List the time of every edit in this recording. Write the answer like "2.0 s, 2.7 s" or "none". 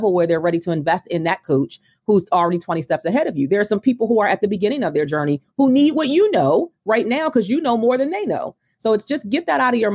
none